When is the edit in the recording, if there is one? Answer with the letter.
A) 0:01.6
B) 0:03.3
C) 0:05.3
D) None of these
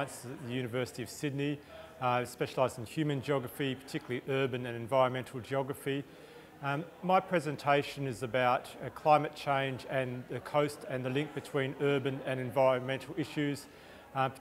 C